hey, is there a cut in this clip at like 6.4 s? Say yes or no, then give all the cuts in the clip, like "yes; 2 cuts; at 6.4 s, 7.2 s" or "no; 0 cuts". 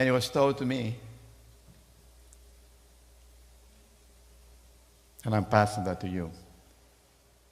no; 1 cut; at 2.2 s